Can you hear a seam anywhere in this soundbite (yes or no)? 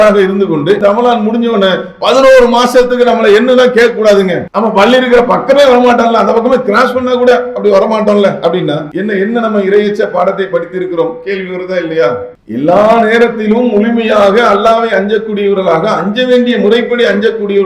yes